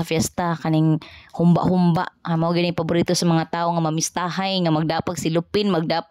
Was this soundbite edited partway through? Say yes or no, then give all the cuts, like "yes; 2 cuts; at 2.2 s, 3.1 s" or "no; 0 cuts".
no; 0 cuts